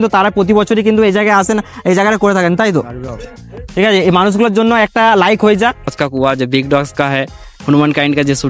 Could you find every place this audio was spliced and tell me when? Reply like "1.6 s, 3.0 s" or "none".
5.9 s